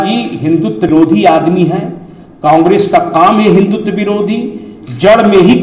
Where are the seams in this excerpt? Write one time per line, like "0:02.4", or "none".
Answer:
0:00.9